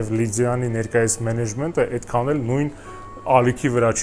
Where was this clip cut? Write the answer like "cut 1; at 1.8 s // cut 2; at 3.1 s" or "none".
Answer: none